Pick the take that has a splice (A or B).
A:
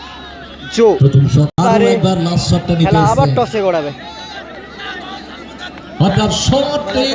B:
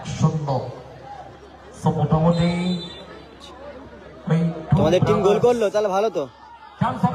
A